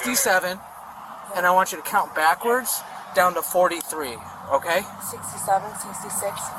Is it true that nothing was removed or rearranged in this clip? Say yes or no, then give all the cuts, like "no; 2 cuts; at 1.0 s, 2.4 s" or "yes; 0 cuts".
yes; 0 cuts